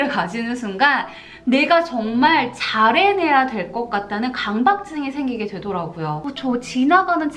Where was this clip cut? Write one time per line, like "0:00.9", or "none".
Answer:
0:06.3